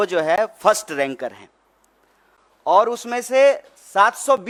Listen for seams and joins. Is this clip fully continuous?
yes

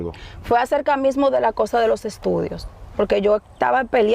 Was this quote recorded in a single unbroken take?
yes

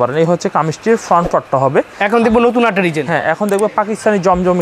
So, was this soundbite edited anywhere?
yes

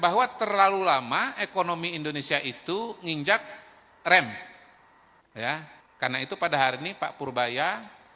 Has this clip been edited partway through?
yes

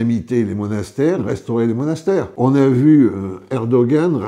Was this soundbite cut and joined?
yes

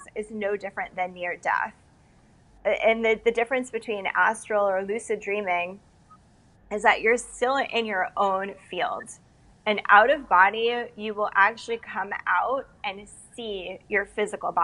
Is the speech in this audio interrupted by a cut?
no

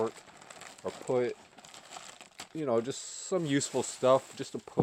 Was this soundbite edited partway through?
no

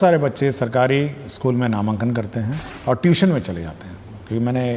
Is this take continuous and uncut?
no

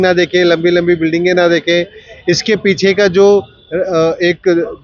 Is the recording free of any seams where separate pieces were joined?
yes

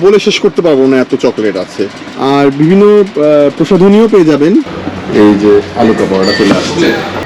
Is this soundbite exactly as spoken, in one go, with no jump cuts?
no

